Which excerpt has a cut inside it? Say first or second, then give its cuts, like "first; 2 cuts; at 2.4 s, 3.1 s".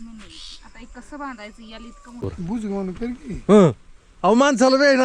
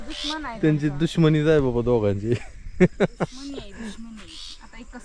first; 1 cut; at 2.2 s